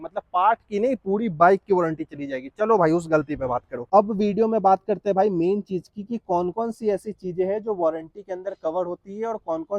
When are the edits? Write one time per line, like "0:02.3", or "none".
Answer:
0:03.8